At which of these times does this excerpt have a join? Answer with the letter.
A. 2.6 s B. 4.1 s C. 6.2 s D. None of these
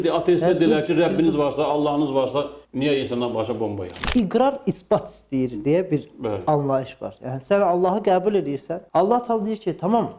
B